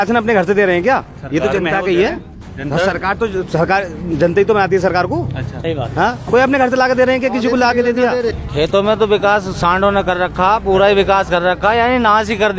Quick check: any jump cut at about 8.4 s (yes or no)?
yes